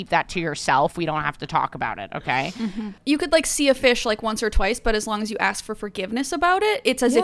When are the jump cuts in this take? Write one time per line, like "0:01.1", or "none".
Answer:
0:02.9

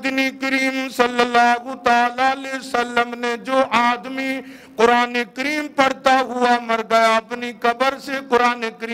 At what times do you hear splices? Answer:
none

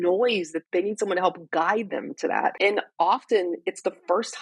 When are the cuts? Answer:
0:02.6

